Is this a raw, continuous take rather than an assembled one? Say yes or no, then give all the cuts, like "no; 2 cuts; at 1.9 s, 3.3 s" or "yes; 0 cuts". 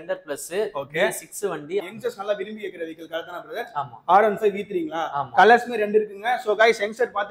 no; 1 cut; at 1.8 s